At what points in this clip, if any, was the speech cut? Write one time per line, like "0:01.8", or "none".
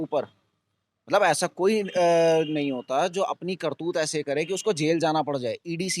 none